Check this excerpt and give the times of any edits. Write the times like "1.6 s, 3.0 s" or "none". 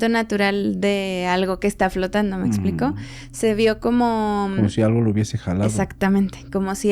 none